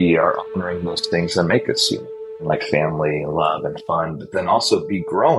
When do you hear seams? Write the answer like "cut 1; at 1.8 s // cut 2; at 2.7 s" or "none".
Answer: cut 1; at 2.3 s